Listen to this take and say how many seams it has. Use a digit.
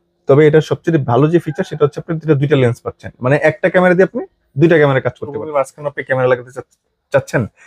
1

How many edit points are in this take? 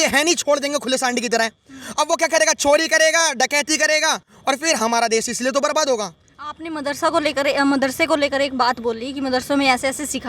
0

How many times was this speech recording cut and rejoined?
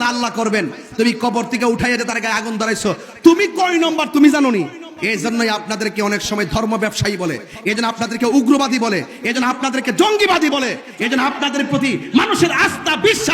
1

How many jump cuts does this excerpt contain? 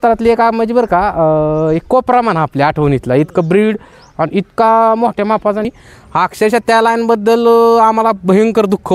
1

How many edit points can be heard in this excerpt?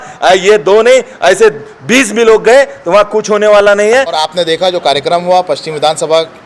1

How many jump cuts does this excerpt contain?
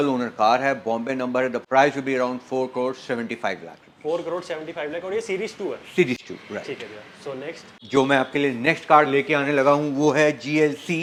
0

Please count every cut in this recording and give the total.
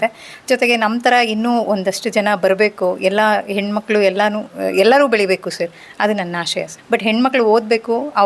1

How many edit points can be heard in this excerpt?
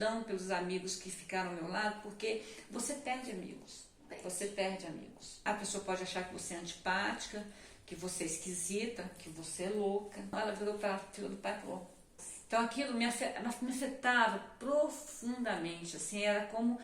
3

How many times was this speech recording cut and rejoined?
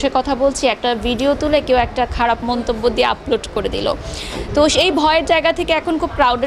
0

